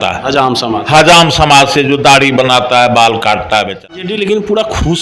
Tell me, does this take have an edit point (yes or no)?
yes